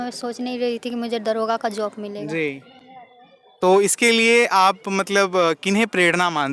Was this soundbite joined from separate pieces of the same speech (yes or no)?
no